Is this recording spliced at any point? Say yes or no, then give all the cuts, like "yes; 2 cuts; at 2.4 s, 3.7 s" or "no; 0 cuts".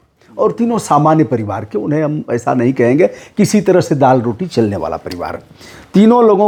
no; 0 cuts